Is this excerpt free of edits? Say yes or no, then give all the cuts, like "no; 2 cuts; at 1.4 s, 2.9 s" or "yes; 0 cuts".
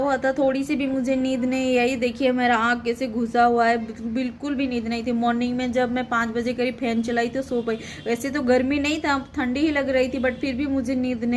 yes; 0 cuts